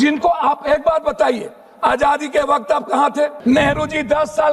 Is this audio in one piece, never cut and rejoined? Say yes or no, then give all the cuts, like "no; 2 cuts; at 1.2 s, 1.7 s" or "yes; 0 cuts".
no; 1 cut; at 3.4 s